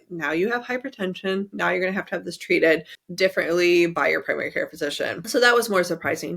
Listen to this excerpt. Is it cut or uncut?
cut